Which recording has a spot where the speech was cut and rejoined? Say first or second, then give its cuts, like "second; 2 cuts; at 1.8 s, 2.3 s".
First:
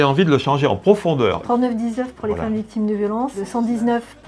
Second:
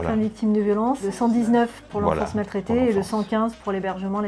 first; 1 cut; at 1.4 s